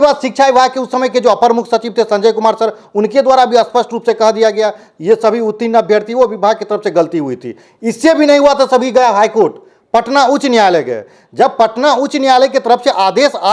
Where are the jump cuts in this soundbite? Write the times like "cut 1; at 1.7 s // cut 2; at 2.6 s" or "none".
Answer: none